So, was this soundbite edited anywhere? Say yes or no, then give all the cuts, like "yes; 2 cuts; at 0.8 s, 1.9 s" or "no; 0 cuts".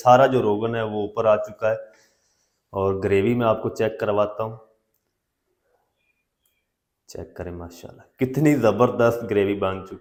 no; 0 cuts